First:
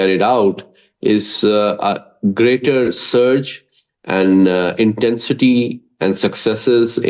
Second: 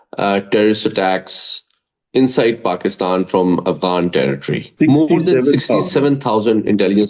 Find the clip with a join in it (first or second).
second